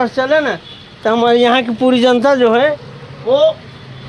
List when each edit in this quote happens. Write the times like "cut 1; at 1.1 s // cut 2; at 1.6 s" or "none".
none